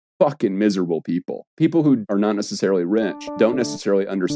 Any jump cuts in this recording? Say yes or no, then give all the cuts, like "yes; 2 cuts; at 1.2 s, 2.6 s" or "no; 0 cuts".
yes; 3 cuts; at 1.4 s, 2.0 s, 3.3 s